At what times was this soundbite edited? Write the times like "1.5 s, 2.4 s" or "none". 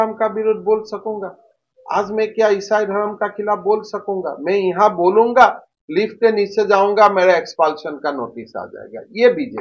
none

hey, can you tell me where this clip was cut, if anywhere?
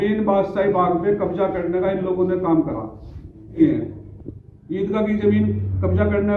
3.6 s

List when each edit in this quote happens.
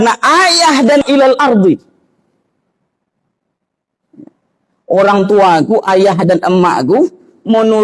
1.0 s

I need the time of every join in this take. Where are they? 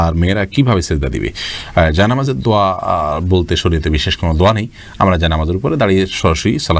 none

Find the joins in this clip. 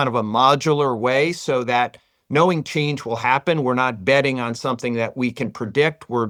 none

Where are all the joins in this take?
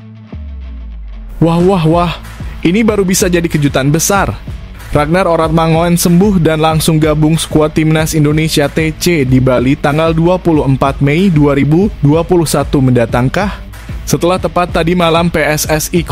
1.3 s

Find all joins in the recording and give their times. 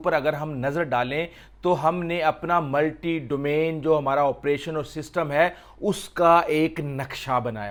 none

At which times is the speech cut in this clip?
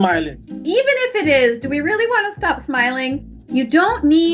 3.2 s

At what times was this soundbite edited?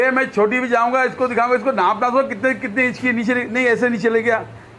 none

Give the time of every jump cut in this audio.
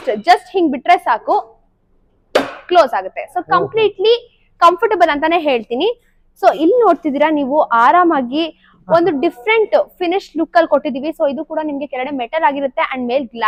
none

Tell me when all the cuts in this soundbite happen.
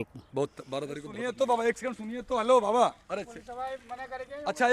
1.0 s

